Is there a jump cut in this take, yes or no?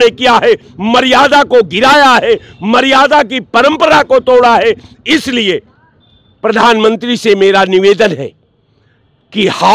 no